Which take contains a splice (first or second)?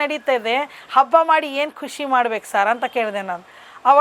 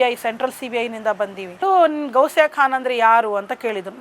second